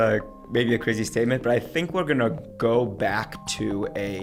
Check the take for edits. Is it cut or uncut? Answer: uncut